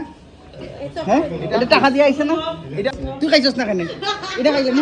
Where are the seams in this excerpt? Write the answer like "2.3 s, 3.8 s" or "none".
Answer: 2.9 s

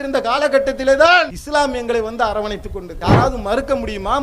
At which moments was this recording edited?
1.4 s, 2.9 s

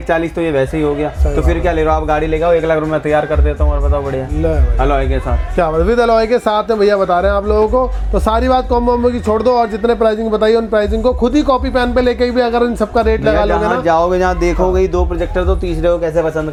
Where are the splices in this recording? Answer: none

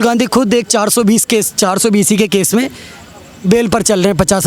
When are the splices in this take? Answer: none

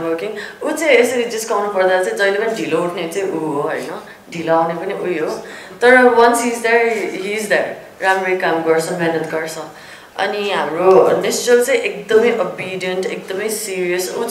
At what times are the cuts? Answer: none

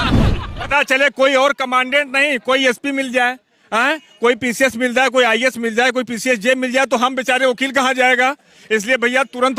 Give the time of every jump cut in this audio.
none

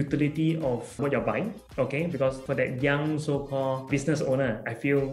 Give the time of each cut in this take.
1.0 s, 2.4 s, 3.9 s

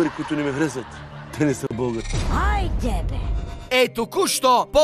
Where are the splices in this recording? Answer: none

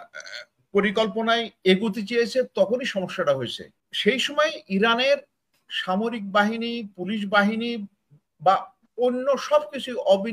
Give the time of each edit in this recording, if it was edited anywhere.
3.8 s

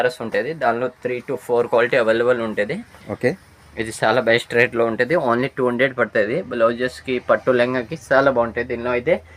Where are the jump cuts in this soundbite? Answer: none

